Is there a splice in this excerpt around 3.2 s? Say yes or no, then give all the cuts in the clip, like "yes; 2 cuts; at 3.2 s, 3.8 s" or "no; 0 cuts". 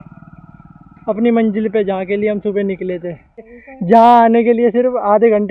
no; 0 cuts